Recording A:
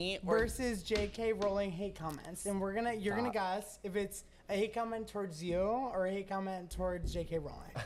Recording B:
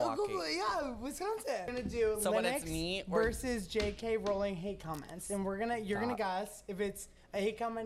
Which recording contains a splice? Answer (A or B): B